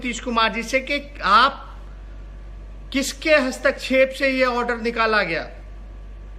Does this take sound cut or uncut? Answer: uncut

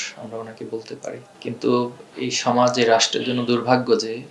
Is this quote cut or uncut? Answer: cut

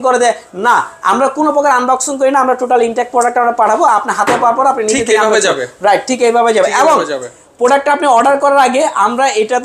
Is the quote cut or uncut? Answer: uncut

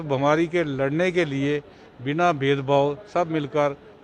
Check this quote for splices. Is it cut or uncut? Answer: uncut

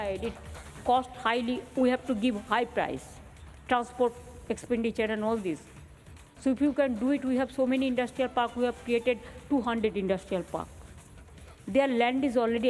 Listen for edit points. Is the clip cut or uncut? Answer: uncut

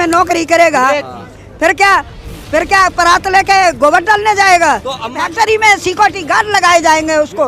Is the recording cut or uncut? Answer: cut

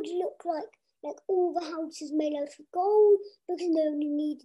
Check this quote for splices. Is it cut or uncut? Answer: uncut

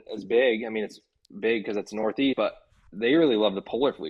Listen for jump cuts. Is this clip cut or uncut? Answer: uncut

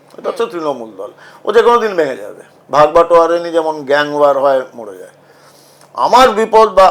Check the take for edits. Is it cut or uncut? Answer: uncut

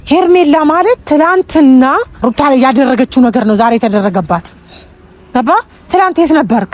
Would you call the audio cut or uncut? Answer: cut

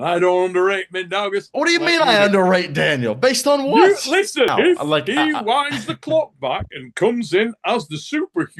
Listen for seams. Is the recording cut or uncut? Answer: cut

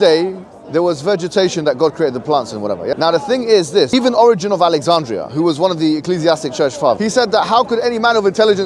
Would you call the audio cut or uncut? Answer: cut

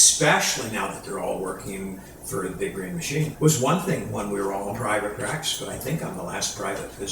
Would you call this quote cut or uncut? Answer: cut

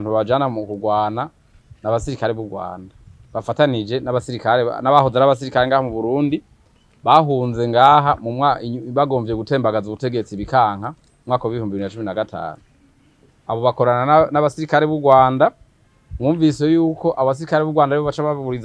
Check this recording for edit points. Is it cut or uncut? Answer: uncut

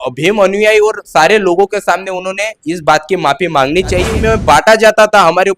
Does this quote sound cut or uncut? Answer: cut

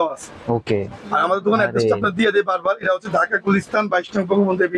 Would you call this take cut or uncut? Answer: uncut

